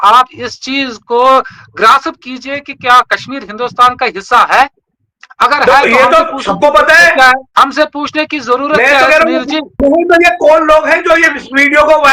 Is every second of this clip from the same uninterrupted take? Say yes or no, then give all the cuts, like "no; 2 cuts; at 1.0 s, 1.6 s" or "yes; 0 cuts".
yes; 0 cuts